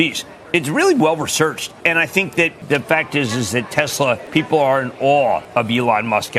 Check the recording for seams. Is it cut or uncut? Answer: cut